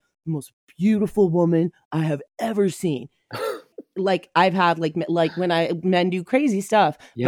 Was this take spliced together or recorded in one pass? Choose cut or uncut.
cut